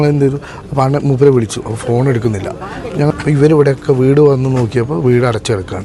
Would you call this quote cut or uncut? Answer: cut